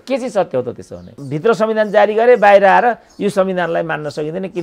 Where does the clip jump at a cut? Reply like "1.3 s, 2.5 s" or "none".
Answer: 1.2 s